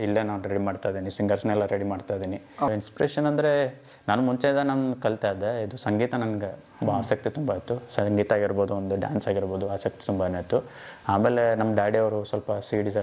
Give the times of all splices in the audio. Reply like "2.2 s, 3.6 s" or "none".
2.7 s